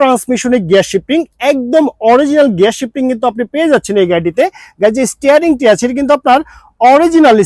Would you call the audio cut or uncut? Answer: uncut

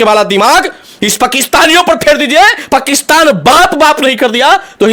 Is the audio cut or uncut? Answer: uncut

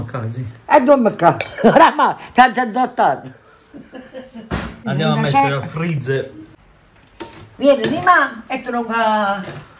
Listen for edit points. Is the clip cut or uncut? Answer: cut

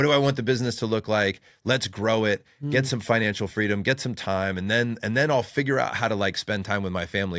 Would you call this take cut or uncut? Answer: uncut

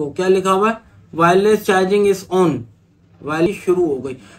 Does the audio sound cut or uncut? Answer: cut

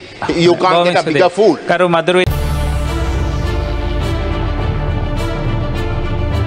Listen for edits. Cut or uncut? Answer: cut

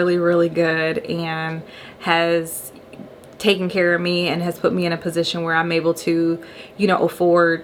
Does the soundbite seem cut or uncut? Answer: uncut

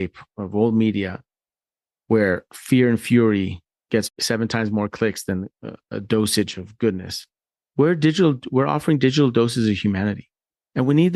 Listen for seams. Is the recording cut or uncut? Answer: cut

